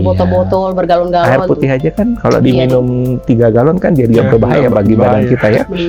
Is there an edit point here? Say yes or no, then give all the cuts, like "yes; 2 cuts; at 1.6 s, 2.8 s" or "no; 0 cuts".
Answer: no; 0 cuts